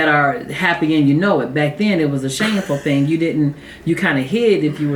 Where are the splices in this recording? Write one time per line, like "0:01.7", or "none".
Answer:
none